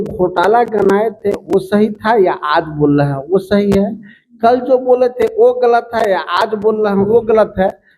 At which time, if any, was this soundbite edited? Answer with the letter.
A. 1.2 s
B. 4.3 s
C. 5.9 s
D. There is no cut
D